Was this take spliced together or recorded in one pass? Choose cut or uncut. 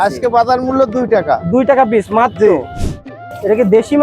cut